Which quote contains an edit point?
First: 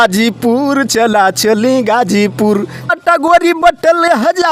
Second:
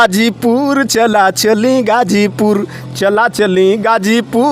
first; 1 cut; at 2.9 s

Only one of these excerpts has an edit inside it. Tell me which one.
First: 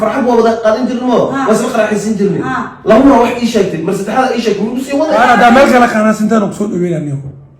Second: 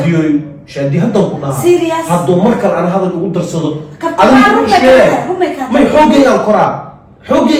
first; 1 cut; at 5.2 s

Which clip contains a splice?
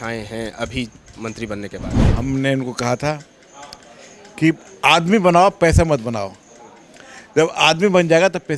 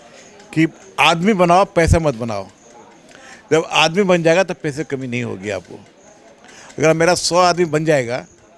first; 1 cut; at 2.0 s

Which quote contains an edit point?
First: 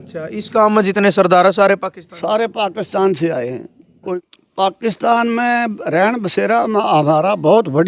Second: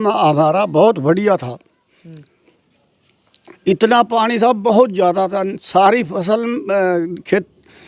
first; 1 cut; at 4.0 s

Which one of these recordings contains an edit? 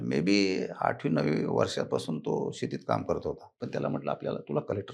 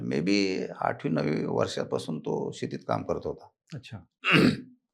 first; 1 cut; at 3.5 s

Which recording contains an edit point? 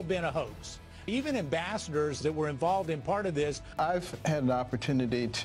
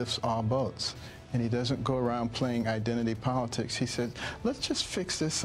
first; 3 cuts; at 1.1 s, 2.1 s, 3.8 s

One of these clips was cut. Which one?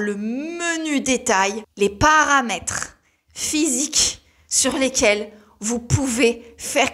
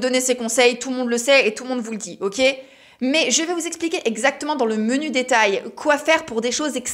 first; 1 cut; at 1.6 s

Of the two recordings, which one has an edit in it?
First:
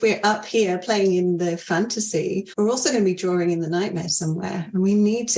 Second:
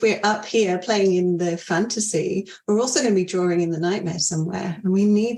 first; 1 cut; at 2.5 s

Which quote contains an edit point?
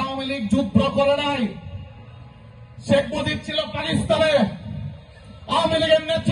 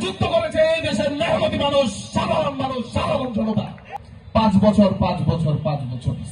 second; 1 cut; at 3.8 s

